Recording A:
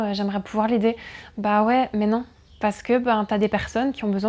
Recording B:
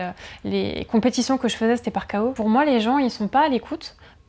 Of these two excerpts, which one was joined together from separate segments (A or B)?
B